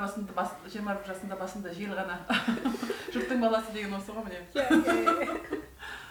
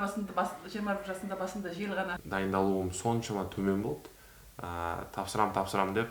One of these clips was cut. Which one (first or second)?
second